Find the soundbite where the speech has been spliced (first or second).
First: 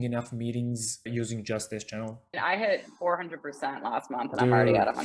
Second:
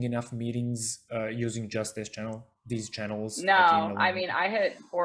first